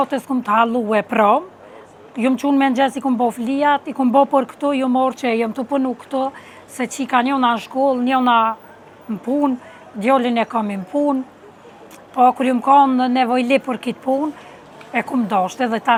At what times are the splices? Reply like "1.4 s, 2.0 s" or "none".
none